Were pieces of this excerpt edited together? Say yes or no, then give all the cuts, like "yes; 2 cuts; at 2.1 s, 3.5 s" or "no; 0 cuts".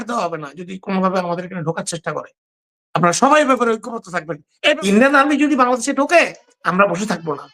yes; 1 cut; at 4.8 s